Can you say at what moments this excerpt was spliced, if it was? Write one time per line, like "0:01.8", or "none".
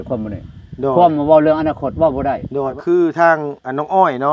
0:02.8